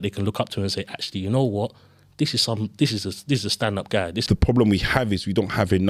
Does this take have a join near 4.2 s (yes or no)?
yes